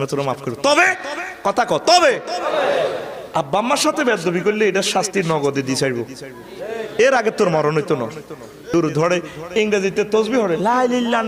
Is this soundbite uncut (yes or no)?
no